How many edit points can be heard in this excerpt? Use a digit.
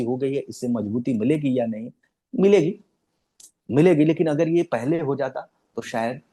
0